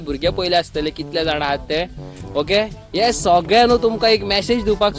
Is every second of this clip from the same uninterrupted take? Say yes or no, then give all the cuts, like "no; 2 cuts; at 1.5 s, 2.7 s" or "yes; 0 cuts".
yes; 0 cuts